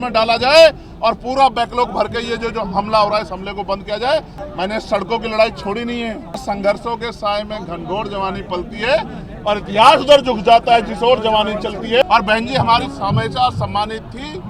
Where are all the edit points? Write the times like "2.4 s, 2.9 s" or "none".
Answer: 4.4 s, 6.4 s, 12.0 s